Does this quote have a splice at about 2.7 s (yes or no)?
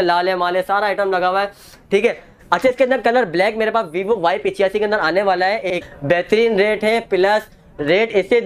no